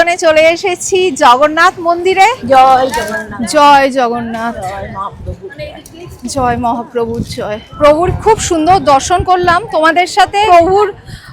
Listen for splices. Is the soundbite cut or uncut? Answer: cut